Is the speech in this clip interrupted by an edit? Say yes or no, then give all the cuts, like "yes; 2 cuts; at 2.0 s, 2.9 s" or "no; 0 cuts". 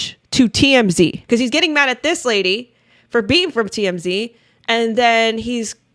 yes; 1 cut; at 1.2 s